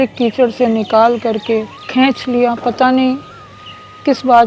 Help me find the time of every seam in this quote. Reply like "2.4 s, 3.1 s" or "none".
1.8 s